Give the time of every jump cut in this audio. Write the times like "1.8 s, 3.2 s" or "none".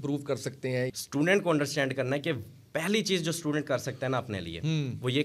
0.9 s